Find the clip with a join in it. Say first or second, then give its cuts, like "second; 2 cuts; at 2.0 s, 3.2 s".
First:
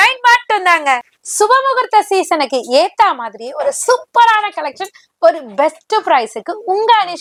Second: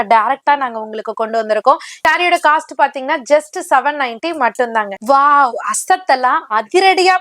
second; 1 cut; at 2.0 s